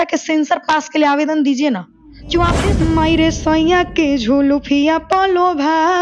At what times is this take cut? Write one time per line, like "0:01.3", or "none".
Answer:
0:02.6